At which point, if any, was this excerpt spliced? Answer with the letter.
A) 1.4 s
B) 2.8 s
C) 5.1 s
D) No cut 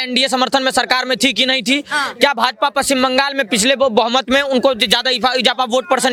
D